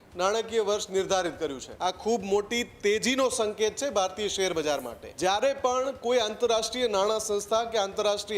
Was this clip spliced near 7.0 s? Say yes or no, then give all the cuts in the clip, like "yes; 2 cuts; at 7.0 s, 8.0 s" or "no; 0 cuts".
no; 2 cuts; at 1.6 s, 5.0 s